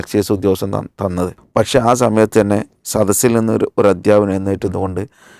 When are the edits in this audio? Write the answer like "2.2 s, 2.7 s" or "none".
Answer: 1.4 s